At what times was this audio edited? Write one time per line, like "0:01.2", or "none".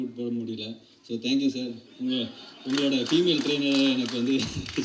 none